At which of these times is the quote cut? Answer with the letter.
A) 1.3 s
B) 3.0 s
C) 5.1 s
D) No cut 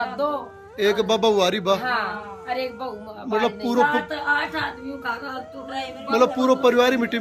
D